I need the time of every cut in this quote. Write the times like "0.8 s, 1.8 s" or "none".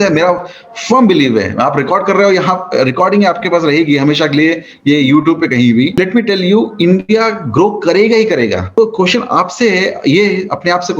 5.9 s, 8.7 s